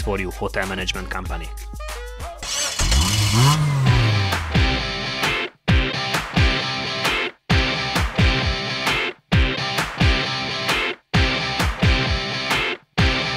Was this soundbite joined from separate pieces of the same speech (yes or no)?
yes